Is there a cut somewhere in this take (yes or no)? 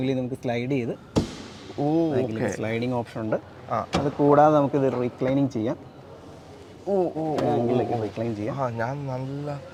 no